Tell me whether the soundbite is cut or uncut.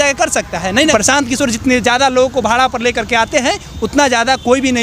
cut